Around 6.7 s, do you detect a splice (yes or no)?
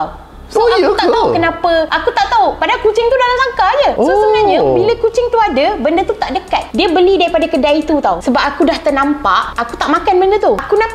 yes